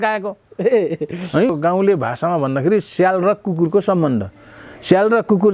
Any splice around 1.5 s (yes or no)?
yes